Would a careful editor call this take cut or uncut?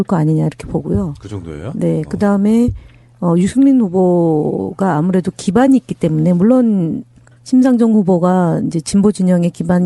cut